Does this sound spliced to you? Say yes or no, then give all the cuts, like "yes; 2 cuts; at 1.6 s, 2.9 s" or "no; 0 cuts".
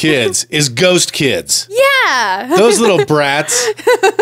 no; 0 cuts